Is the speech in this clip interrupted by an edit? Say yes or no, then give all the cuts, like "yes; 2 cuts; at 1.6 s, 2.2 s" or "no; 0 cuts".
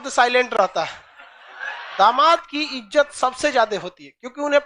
yes; 1 cut; at 1.8 s